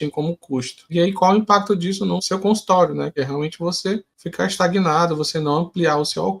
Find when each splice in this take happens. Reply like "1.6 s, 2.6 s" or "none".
0.9 s, 2.2 s, 3.2 s, 4.2 s